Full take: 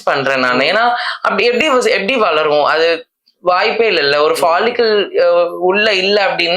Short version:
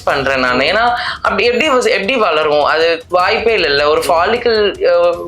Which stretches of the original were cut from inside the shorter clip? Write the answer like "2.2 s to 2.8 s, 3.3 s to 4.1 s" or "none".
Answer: 3.0 s to 3.4 s